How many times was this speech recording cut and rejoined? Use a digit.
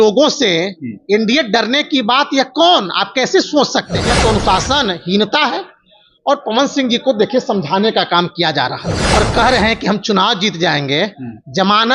2